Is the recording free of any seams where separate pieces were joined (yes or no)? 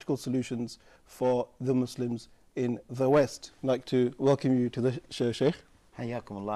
no